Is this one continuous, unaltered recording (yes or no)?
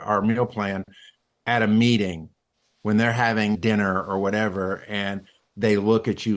no